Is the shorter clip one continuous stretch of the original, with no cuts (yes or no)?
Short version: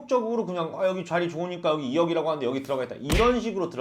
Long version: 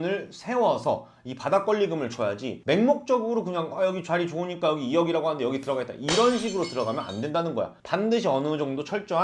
yes